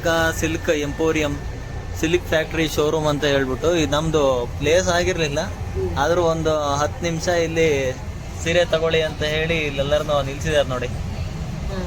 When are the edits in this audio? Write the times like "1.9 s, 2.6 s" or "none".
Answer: none